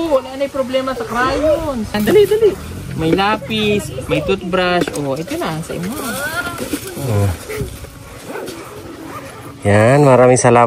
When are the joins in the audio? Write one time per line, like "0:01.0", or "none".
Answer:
0:01.9